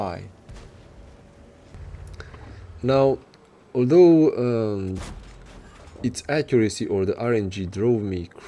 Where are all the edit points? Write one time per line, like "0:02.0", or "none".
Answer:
0:01.8